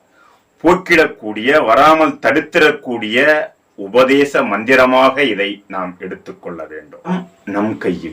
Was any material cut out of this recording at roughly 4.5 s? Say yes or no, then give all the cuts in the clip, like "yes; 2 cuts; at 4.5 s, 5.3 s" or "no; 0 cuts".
no; 1 cut; at 7.1 s